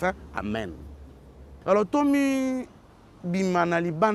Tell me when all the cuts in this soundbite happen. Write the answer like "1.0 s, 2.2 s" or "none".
1.5 s